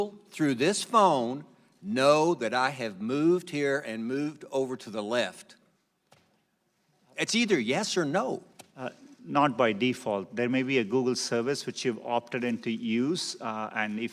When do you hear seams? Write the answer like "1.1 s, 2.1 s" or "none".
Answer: none